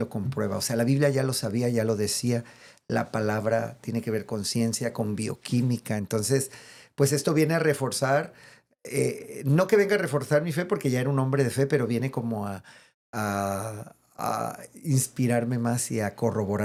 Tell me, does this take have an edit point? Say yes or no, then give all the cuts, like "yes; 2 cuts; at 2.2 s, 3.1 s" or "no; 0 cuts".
no; 0 cuts